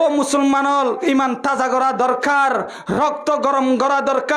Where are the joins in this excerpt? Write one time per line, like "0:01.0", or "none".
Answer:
0:01.0